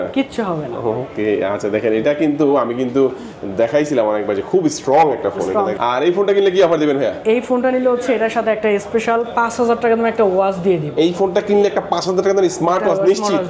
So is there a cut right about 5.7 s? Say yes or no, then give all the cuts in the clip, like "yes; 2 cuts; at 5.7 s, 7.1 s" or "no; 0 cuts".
yes; 1 cut; at 5.7 s